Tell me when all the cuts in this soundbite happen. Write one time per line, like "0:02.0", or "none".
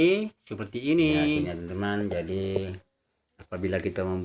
0:01.5